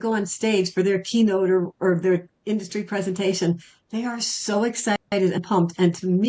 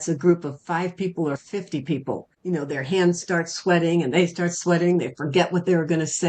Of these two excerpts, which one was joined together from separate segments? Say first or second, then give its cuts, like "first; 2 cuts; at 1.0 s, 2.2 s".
second; 1 cut; at 2.3 s